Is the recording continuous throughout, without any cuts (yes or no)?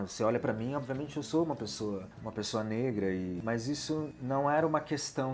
no